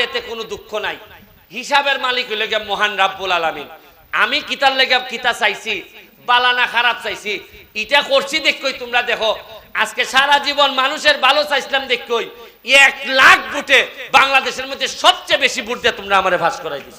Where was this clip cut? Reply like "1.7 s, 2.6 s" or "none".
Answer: none